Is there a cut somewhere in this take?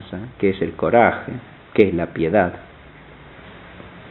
no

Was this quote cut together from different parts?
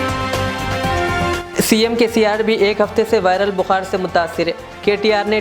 yes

